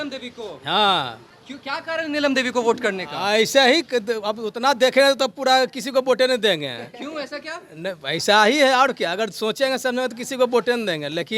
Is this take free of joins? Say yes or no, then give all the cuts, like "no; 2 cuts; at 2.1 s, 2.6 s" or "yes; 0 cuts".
yes; 0 cuts